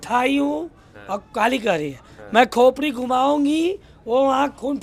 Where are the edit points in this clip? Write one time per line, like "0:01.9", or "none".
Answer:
none